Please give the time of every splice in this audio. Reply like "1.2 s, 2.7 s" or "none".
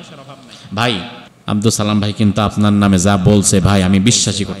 1.3 s